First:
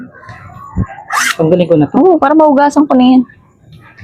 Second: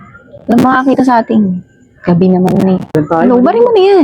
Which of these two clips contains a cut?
second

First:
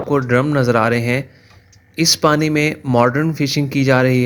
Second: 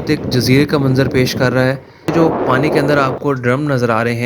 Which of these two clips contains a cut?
second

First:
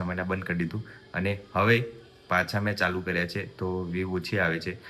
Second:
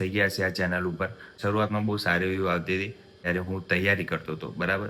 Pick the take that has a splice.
second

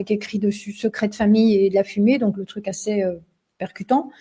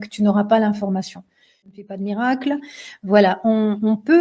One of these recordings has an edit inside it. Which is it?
second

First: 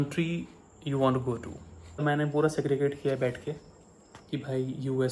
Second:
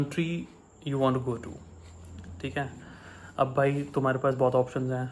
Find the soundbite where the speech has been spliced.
first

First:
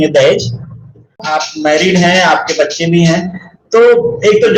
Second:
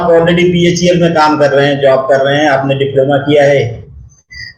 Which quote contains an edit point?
first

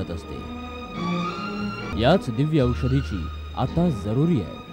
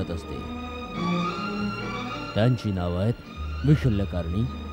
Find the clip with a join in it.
first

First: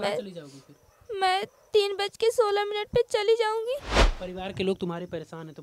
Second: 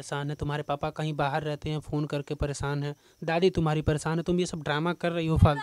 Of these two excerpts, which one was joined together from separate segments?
first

